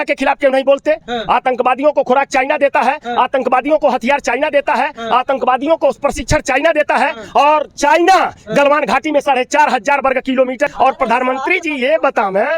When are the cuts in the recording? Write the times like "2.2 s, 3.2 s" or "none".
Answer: 10.7 s